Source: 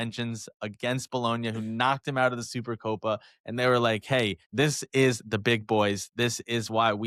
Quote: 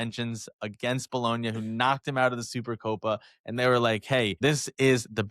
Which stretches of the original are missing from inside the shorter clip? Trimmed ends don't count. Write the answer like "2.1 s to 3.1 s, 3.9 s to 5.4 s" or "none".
4.3 s to 4.5 s